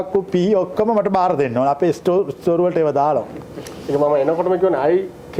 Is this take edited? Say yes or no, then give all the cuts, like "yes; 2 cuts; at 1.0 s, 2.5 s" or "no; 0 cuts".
no; 0 cuts